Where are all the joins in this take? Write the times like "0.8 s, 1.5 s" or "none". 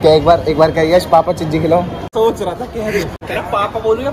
2.0 s, 3.1 s